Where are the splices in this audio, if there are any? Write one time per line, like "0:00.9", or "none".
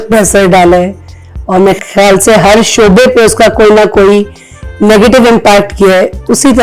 none